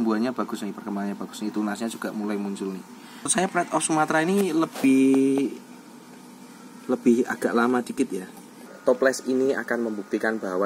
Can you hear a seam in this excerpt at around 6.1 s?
no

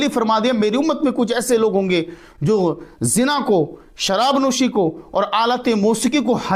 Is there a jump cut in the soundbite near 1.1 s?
no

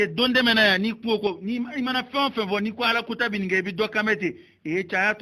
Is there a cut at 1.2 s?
yes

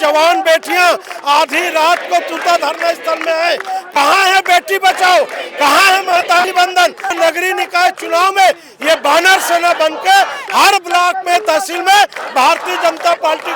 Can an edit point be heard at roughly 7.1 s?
yes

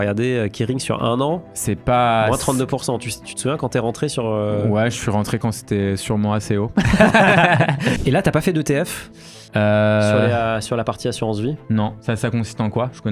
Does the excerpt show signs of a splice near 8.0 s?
yes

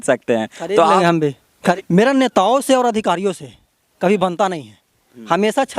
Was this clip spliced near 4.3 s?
no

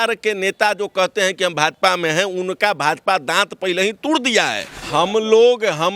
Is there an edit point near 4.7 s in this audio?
yes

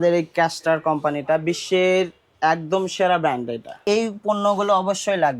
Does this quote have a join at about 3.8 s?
yes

